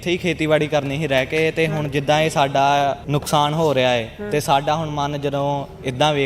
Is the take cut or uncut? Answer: cut